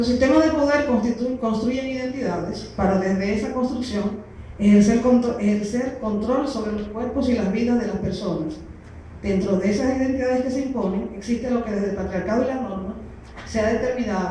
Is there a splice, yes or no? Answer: no